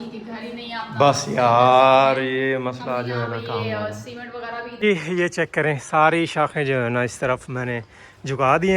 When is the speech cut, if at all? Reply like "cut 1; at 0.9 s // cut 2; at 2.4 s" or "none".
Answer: cut 1; at 4.7 s